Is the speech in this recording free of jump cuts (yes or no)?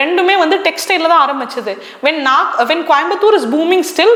yes